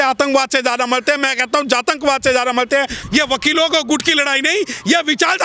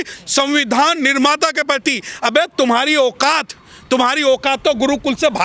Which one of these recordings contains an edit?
first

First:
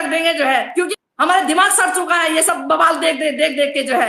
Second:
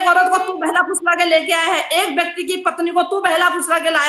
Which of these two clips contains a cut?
first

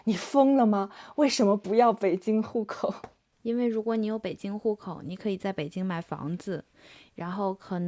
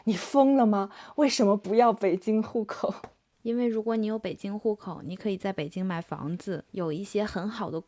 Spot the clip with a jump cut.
second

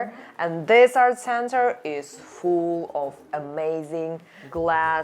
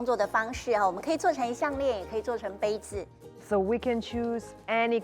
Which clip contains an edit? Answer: second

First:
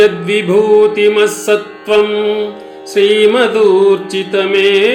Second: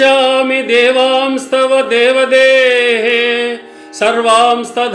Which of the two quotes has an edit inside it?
second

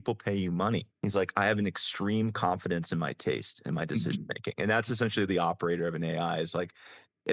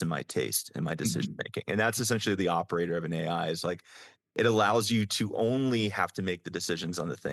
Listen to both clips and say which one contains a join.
first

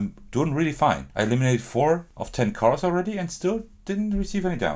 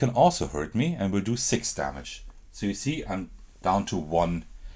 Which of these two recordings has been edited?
first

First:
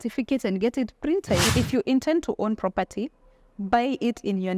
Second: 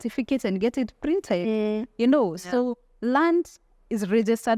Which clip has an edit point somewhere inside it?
first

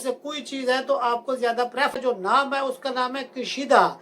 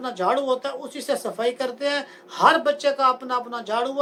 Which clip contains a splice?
first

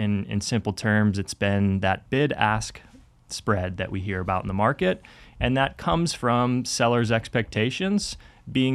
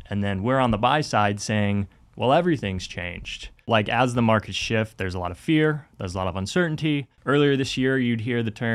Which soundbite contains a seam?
second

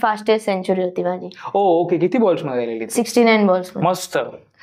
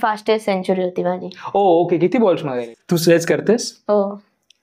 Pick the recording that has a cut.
second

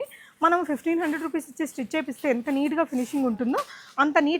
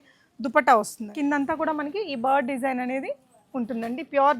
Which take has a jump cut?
second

